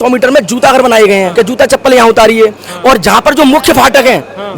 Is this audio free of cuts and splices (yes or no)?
no